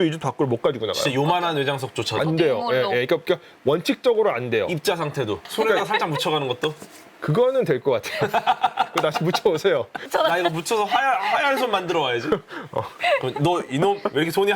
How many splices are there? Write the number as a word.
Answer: two